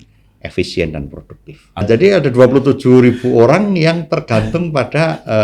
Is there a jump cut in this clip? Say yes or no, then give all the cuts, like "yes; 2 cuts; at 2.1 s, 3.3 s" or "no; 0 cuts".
yes; 1 cut; at 1.8 s